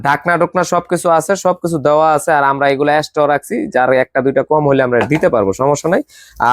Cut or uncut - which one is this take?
uncut